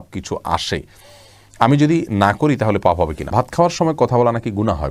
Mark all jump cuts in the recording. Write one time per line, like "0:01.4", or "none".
0:03.3